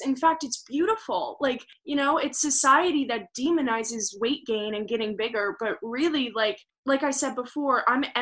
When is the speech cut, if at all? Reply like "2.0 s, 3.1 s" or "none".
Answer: 1.7 s